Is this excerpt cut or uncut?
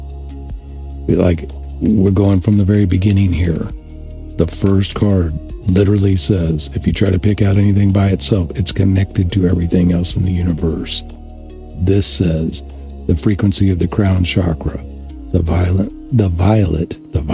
uncut